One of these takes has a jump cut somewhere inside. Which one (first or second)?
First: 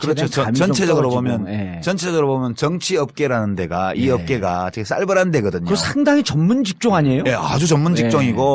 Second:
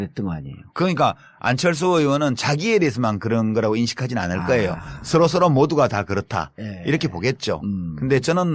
second